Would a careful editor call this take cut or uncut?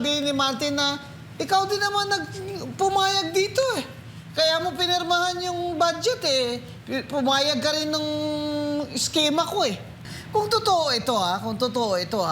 cut